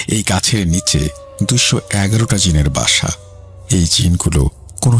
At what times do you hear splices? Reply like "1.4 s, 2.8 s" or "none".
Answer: none